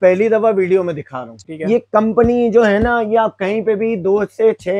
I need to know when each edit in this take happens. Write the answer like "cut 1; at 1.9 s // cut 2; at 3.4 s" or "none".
cut 1; at 1.4 s